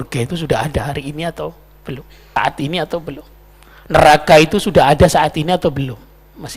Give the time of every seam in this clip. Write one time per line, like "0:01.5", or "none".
0:02.4